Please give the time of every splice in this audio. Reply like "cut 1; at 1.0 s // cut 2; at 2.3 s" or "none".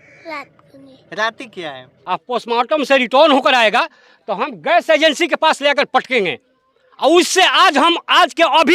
cut 1; at 1.9 s